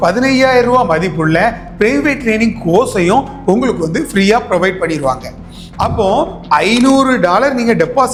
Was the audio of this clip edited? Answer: no; 0 cuts

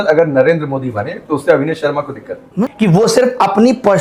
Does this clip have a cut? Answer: yes; 1 cut; at 2.7 s

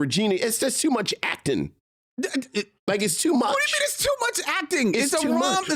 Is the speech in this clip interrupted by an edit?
no; 0 cuts

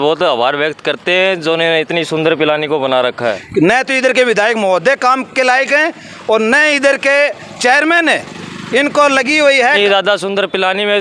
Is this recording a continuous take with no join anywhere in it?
no; 2 cuts; at 3.4 s, 9.8 s

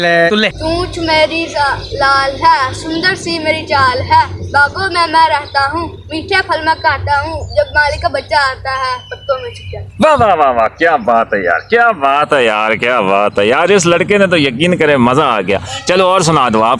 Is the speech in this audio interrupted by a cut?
no; 0 cuts

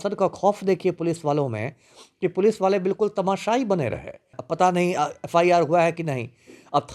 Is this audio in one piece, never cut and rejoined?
no; 1 cut; at 4.4 s

